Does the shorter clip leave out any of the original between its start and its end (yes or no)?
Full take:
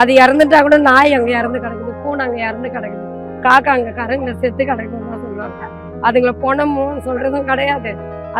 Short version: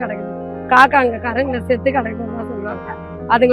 no